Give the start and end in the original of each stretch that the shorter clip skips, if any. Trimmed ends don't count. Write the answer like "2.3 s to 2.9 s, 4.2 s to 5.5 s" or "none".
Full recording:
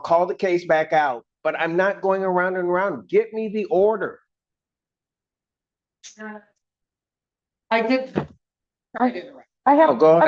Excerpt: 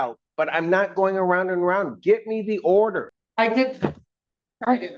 4.2 s to 7.5 s